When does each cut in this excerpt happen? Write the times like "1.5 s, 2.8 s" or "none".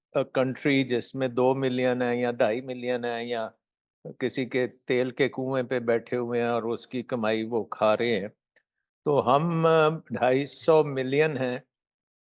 none